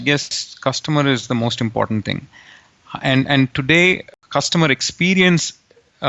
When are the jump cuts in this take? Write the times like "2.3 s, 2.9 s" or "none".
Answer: 4.1 s